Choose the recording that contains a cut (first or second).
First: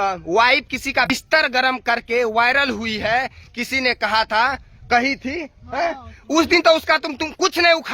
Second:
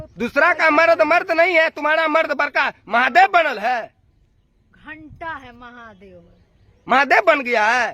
first